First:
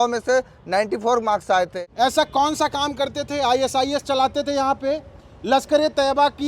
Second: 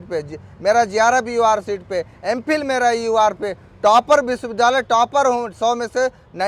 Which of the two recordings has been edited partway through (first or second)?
first